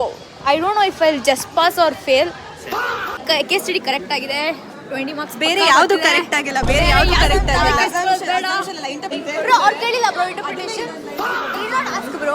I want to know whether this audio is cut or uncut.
cut